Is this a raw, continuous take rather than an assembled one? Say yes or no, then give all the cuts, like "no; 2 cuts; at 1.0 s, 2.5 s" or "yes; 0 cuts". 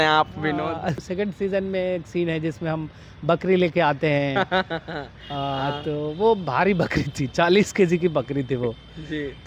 no; 1 cut; at 1.0 s